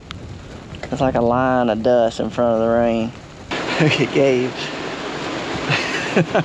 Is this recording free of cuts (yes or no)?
no